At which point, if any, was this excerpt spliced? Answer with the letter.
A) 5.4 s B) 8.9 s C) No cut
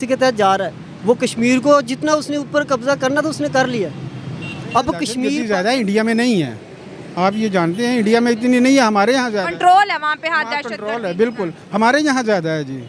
A